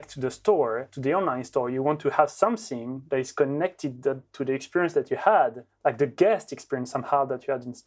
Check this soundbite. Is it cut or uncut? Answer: cut